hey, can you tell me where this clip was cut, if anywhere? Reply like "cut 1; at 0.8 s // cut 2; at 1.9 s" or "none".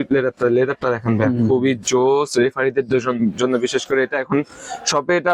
none